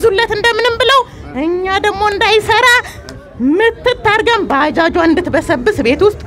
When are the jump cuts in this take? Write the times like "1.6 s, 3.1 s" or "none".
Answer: none

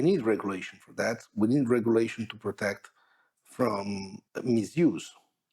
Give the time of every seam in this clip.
4.2 s

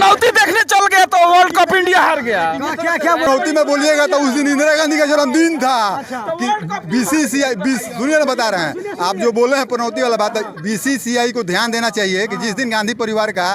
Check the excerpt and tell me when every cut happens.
3.3 s

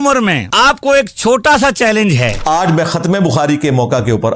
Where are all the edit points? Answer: 2.4 s

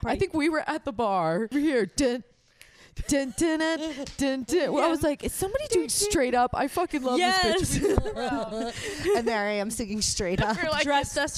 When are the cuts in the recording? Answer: 1.5 s

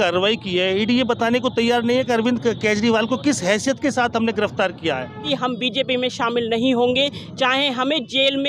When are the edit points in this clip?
5.2 s

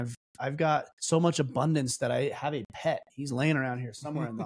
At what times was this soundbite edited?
0.9 s

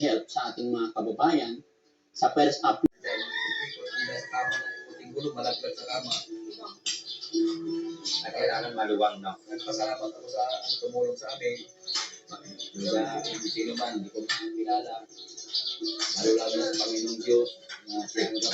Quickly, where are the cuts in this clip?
2.9 s

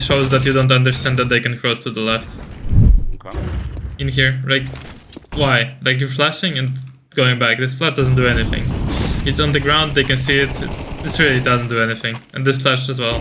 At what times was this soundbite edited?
2.8 s

